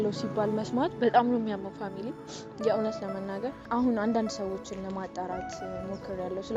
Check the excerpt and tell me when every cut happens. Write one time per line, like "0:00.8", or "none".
0:03.6